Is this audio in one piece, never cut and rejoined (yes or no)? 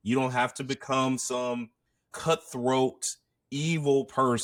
yes